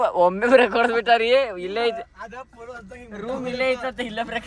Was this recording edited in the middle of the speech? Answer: no; 0 cuts

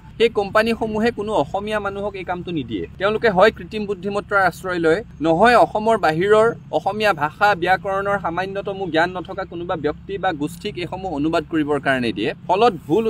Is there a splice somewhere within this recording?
no; 0 cuts

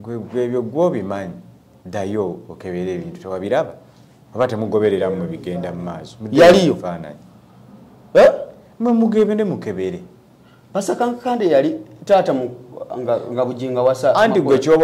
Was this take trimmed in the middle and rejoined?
no; 0 cuts

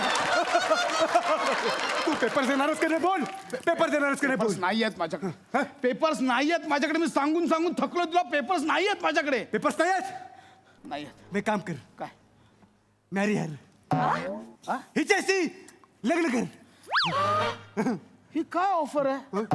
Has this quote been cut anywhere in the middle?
no; 0 cuts

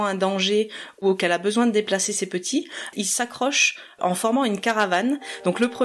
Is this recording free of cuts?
no; 2 cuts; at 1.0 s, 2.9 s

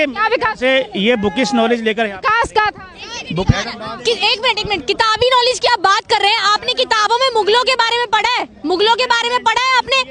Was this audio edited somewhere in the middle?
no; 0 cuts

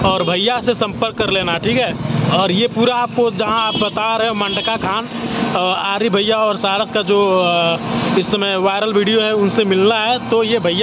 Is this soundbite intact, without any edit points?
yes; 0 cuts

